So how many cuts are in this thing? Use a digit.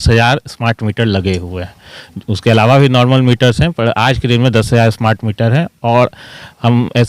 0